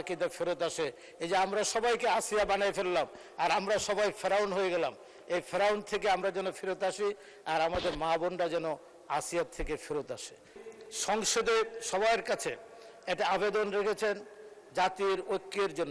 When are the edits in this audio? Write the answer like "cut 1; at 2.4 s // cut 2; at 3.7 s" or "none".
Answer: cut 1; at 10.7 s